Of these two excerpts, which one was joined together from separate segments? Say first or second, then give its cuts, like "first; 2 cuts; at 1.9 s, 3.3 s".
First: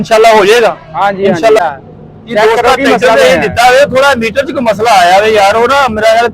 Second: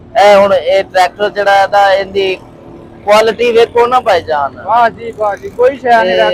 first; 1 cut; at 1.6 s